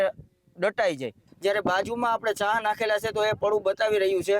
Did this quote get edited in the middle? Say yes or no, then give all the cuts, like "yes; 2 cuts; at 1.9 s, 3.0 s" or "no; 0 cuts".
yes; 1 cut; at 1.3 s